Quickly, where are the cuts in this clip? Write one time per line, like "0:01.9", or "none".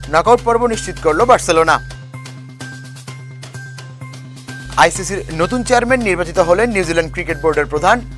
none